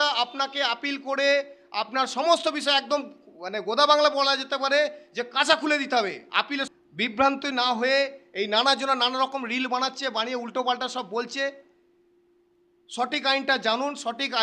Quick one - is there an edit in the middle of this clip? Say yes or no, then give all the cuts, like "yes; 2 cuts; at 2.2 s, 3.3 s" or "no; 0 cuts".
yes; 1 cut; at 6.6 s